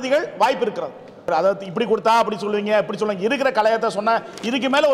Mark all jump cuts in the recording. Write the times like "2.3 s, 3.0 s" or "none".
1.3 s